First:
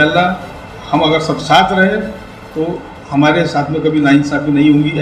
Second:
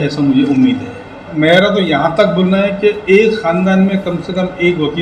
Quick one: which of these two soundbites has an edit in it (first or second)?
second